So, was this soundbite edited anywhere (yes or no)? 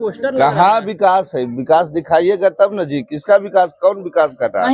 no